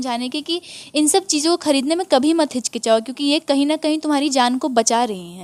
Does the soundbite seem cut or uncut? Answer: uncut